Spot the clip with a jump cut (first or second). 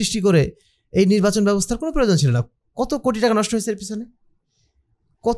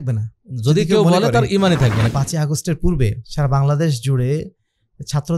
second